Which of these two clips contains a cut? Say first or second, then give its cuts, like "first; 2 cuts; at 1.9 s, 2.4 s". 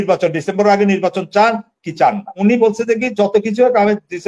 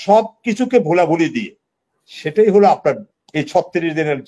first; 1 cut; at 2.3 s